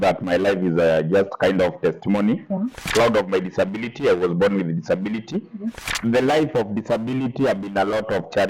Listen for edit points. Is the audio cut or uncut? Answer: cut